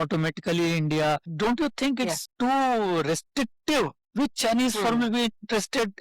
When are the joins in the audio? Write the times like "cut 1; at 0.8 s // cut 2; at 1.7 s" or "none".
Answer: cut 1; at 4.0 s